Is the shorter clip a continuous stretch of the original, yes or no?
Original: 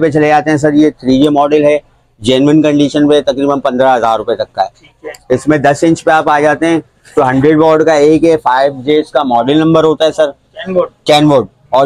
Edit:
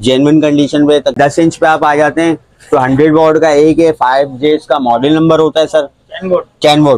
no